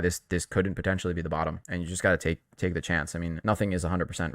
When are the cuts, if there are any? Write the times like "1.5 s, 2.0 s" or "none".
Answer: 1.6 s, 3.4 s